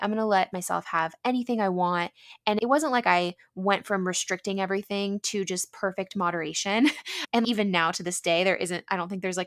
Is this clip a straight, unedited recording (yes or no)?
yes